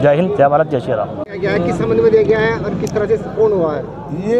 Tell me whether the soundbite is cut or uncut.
cut